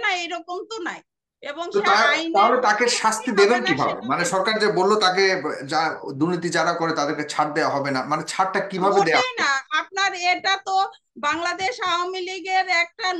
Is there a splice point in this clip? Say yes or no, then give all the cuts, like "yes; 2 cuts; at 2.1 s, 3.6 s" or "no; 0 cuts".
no; 0 cuts